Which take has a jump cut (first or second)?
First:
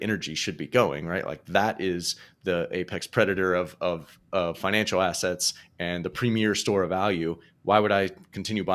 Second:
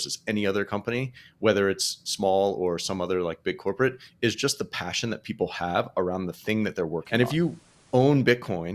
second